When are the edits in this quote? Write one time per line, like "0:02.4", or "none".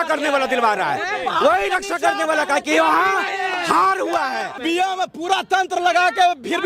0:04.6